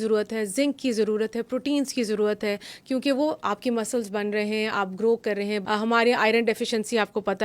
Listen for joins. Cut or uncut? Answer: cut